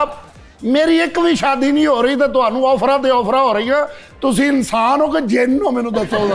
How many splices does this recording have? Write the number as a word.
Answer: zero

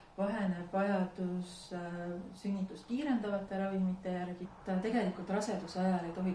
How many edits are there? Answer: one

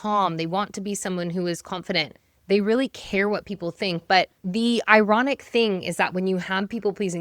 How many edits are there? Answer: one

